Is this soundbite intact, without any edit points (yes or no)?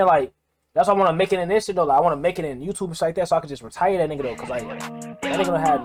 yes